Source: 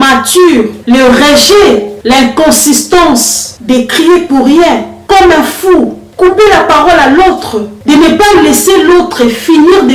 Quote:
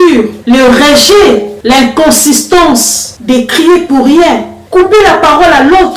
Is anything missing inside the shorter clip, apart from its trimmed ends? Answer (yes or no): yes